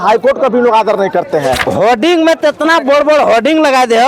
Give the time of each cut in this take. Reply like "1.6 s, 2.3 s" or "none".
1.6 s